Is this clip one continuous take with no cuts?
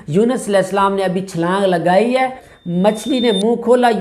no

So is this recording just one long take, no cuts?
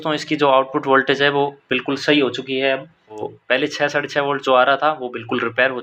no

